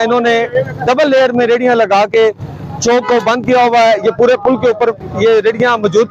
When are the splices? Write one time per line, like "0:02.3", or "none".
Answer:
none